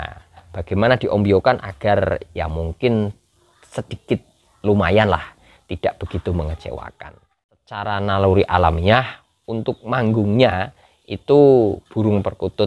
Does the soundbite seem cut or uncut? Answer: cut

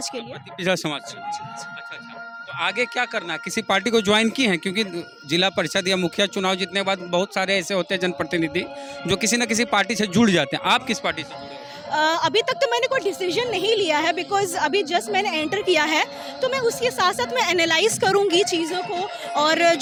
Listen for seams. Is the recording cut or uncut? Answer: uncut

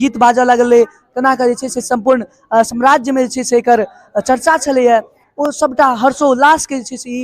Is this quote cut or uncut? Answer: uncut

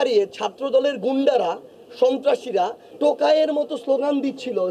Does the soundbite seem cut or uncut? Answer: cut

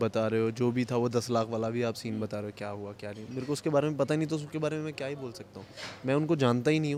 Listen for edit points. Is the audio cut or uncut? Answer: uncut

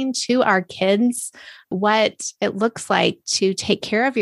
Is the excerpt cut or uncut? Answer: cut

